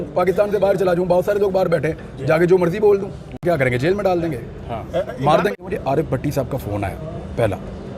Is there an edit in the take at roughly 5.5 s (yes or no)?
yes